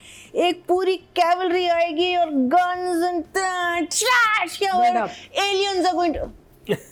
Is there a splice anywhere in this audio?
no; 0 cuts

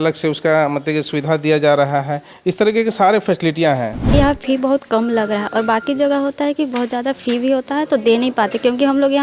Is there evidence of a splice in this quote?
yes; 1 cut; at 4.0 s

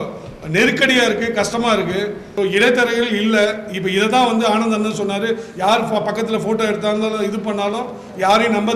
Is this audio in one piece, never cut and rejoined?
no; 1 cut; at 2.3 s

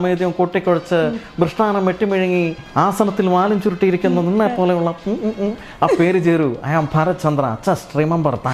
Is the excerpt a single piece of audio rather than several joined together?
no; 1 cut; at 2.6 s

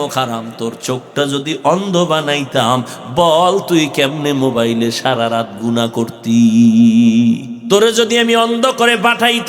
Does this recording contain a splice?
yes; 1 cut; at 7.5 s

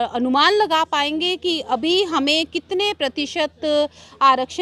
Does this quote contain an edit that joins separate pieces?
no; 0 cuts

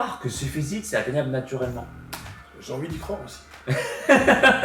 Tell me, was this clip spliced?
no; 0 cuts

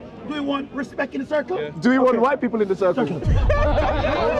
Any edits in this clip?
no; 0 cuts

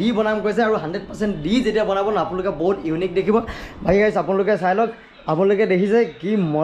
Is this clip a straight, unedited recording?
yes; 0 cuts

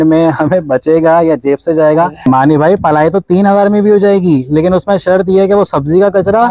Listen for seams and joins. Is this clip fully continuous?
no; 1 cut; at 2.3 s

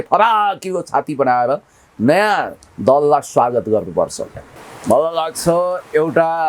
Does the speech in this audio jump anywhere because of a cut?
yes; 1 cut; at 4.6 s

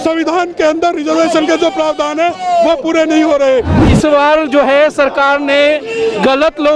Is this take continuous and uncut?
no; 1 cut; at 3.8 s

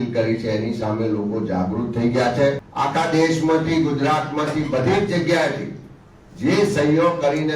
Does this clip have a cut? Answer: yes; 1 cut; at 2.7 s

